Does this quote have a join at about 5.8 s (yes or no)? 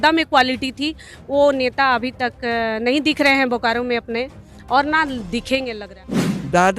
yes